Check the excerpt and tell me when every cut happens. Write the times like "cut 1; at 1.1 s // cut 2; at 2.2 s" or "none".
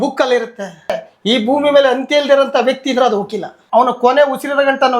cut 1; at 1.1 s // cut 2; at 3.5 s